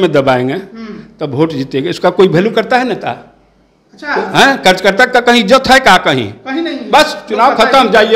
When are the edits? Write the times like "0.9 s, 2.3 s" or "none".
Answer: none